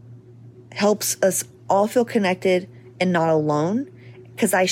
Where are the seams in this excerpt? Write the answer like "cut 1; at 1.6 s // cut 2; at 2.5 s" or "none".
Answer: none